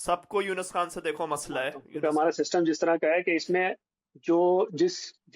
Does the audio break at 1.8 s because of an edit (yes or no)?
yes